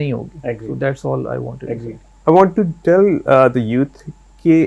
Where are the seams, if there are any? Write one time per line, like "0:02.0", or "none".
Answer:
0:02.0